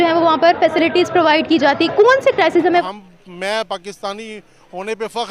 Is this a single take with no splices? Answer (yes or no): no